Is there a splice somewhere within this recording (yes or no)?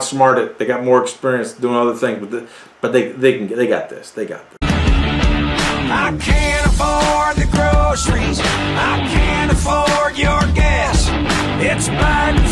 yes